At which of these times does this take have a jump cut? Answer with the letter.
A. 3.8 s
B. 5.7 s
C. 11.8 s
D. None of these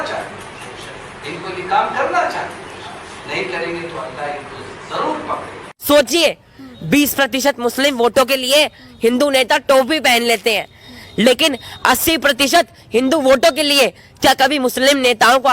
B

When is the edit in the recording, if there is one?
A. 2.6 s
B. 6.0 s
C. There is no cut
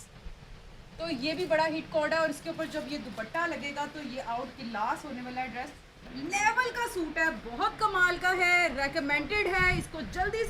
B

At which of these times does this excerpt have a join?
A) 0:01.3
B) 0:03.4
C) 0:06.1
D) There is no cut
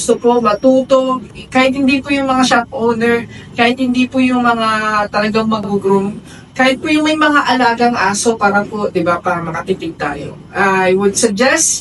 A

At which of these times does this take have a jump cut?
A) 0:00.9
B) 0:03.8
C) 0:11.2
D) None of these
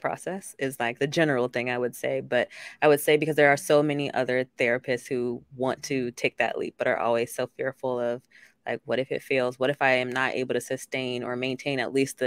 A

